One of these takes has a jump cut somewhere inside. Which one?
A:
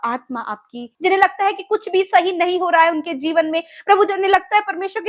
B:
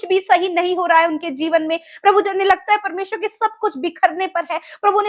A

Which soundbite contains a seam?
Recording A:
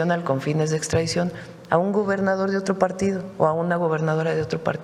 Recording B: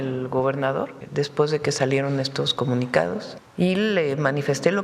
B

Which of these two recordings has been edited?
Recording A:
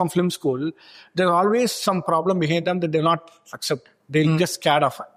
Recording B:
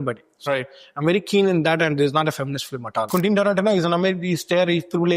B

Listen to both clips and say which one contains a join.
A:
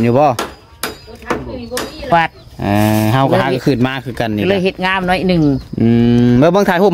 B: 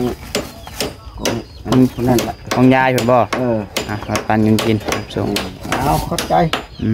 A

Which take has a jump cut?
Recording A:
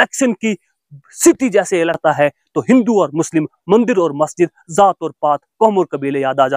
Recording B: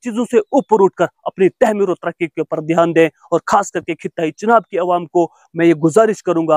A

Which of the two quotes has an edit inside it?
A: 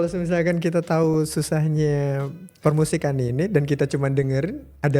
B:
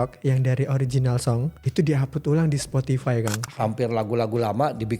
B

